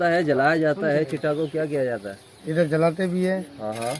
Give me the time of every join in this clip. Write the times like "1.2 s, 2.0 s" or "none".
none